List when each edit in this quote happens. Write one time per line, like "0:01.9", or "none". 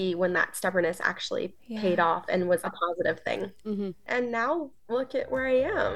0:04.1